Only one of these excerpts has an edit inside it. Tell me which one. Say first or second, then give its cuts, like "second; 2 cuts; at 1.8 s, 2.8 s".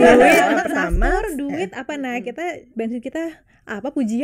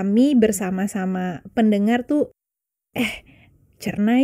first; 1 cut; at 2.7 s